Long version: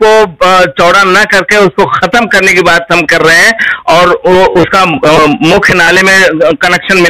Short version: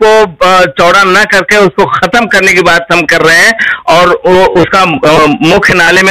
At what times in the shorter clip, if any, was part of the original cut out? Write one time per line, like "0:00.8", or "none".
none